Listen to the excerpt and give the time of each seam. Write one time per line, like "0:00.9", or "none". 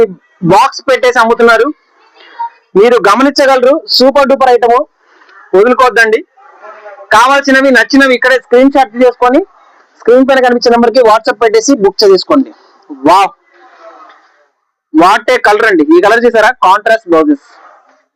none

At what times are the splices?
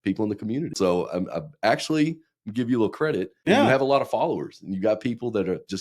0:00.7
0:03.3

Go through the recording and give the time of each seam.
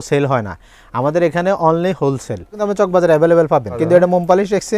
0:02.6
0:03.7

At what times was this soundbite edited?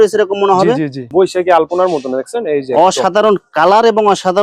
0:01.1

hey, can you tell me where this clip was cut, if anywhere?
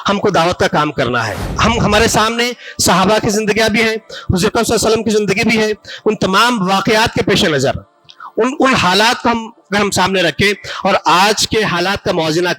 0:01.4

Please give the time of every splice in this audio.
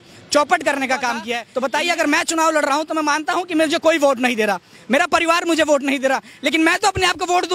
0:01.4

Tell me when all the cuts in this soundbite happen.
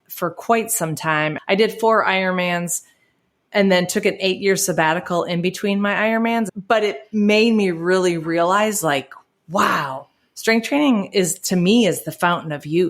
0:01.4
0:06.5

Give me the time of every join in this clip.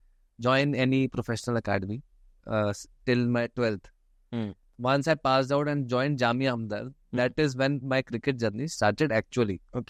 none

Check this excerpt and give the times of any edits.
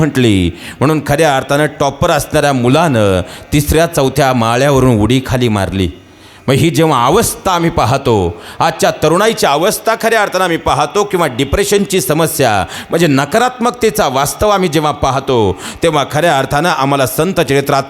none

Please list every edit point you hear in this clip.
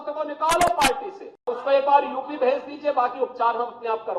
0:01.5

